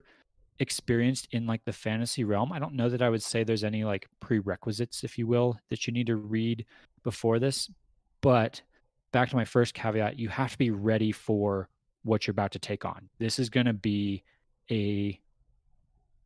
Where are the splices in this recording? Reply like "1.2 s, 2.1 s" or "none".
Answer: 13.0 s